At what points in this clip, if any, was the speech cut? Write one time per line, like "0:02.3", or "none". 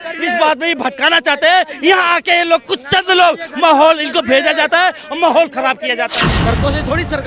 0:06.2